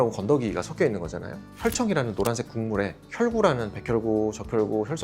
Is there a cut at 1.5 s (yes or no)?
no